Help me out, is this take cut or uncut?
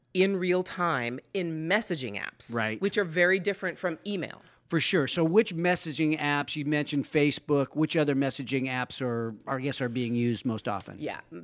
uncut